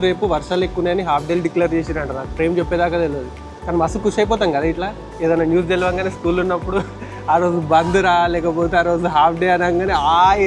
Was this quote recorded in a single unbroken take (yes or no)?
yes